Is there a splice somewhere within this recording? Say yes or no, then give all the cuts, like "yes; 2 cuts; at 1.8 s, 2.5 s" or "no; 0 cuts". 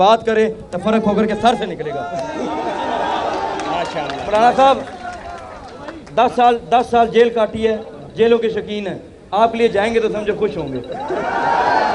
no; 0 cuts